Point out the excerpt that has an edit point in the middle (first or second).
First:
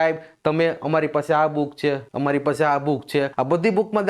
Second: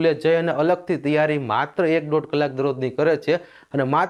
first